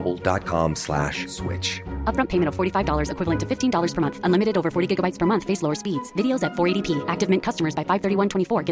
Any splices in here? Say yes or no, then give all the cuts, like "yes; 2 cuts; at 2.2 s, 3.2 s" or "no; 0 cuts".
no; 0 cuts